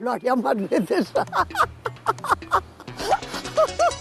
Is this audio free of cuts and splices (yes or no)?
yes